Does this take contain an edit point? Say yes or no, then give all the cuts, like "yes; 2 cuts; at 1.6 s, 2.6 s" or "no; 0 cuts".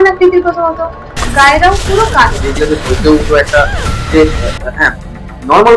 yes; 1 cut; at 2.5 s